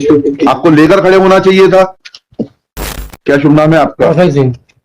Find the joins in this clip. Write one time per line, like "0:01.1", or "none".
0:03.1